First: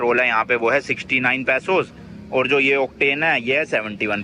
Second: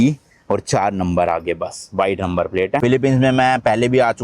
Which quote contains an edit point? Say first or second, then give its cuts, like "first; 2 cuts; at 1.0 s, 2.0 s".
second; 1 cut; at 2.8 s